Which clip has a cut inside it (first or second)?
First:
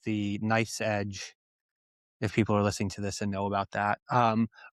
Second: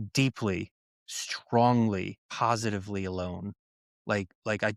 second